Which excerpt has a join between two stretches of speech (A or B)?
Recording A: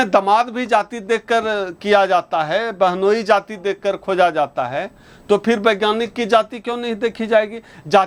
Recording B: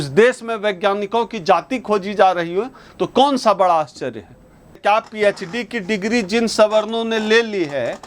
B